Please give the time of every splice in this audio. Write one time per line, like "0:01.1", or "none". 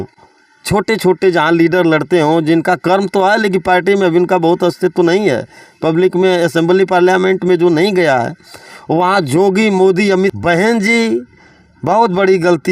0:10.4